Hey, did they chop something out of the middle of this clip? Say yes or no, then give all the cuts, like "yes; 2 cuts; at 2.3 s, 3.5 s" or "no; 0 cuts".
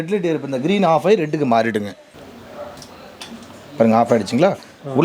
yes; 1 cut; at 2.2 s